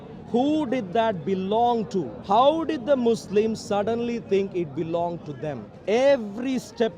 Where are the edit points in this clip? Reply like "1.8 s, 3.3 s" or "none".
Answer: 2.2 s, 5.7 s